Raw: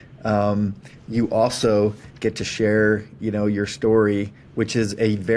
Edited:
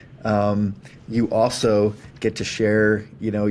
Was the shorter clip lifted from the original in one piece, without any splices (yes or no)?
yes